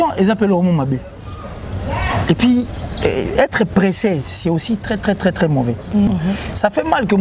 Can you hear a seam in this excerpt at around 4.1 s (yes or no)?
no